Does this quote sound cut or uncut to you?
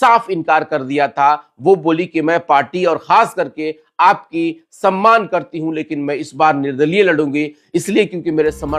uncut